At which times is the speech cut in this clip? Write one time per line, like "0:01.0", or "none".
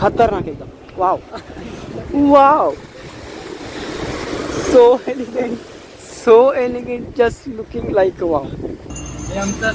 0:08.4